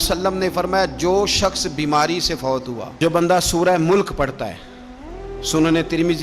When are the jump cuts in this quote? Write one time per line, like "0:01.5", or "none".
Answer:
0:02.9